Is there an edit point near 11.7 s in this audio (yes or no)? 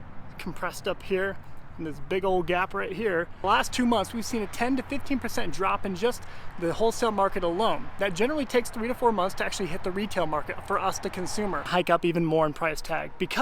yes